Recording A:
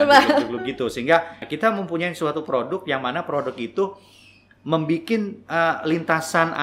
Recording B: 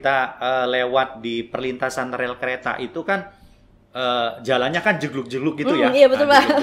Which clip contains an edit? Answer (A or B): A